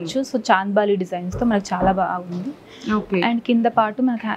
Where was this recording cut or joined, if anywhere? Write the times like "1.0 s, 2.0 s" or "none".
none